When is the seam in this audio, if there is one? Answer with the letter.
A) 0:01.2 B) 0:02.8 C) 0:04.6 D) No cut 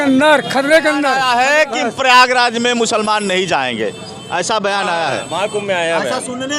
A